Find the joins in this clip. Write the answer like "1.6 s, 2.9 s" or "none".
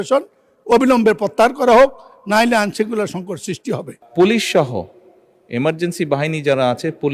4.0 s